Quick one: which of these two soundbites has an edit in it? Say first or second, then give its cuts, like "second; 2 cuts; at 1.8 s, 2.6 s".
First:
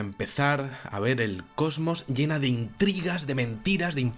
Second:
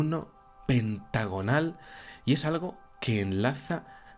second; 1 cut; at 1.6 s